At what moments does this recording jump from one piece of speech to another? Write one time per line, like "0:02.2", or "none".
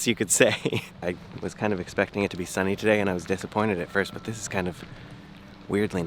0:01.0